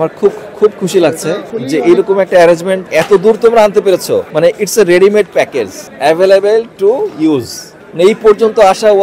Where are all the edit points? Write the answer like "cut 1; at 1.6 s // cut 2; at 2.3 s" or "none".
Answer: cut 1; at 1.5 s // cut 2; at 2.8 s // cut 3; at 4.3 s // cut 4; at 5.8 s